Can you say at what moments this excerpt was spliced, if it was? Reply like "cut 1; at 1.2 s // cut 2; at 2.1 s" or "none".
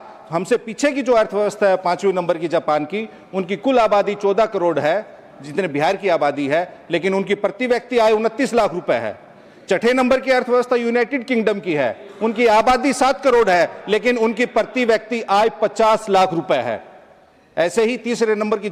none